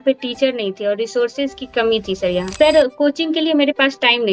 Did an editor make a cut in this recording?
yes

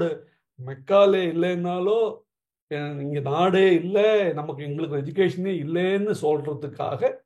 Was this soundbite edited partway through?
no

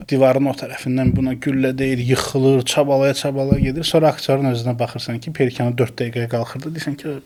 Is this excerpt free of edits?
yes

